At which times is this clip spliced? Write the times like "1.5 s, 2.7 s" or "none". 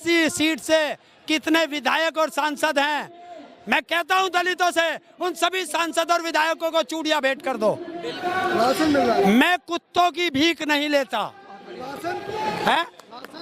8.2 s